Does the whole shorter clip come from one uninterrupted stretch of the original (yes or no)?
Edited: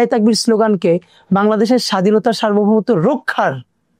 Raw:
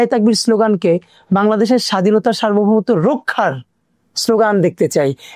yes